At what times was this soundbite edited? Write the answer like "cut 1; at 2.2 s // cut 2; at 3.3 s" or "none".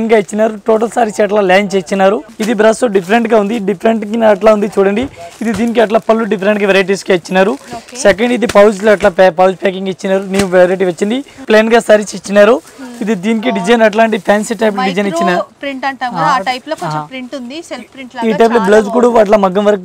cut 1; at 2.3 s // cut 2; at 11.4 s